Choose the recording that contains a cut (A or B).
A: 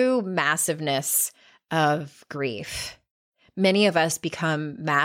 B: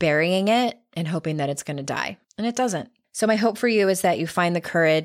B